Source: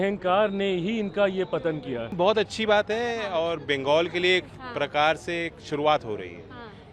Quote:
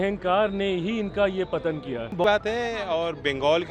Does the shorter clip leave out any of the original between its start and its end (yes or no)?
yes